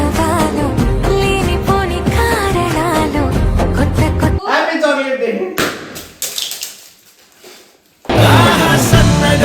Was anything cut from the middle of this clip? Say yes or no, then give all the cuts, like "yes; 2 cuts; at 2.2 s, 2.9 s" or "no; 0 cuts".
yes; 1 cut; at 4.4 s